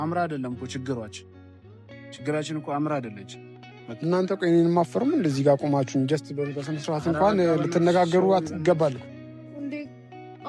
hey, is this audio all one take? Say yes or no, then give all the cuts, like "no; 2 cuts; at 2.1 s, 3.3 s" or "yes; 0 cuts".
yes; 0 cuts